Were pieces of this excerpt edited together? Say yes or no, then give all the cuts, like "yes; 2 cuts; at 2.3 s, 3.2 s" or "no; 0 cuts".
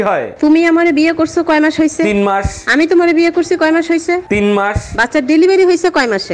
no; 0 cuts